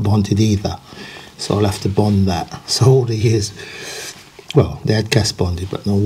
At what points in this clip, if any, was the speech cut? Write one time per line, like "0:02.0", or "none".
none